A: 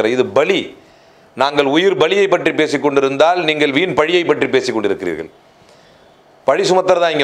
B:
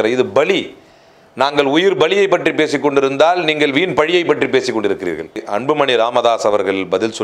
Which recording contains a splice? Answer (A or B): B